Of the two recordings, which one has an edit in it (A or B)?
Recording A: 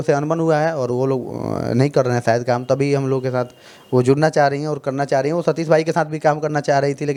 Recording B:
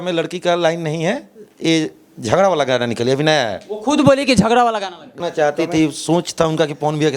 B